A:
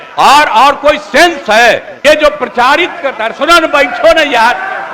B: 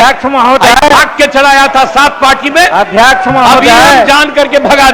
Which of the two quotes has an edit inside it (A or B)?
A